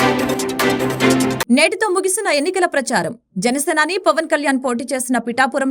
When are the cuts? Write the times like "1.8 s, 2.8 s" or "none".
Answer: 1.4 s